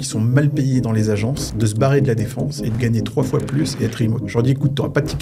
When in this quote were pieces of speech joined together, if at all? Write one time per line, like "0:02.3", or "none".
0:01.4
0:02.7
0:04.2

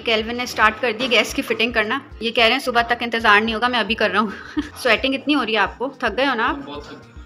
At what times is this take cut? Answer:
none

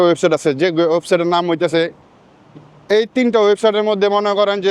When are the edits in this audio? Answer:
0:02.0

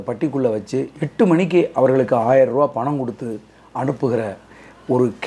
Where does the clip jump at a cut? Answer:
none

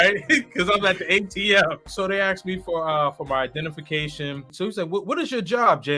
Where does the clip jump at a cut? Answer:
0:01.9
0:04.5

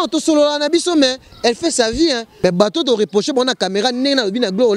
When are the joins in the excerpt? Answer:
0:02.3

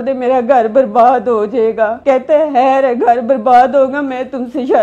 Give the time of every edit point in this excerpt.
0:02.0

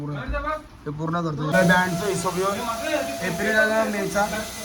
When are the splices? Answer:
0:01.5

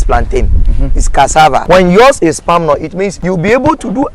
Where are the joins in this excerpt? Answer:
0:01.6
0:03.2

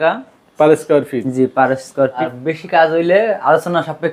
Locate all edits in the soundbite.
0:02.3

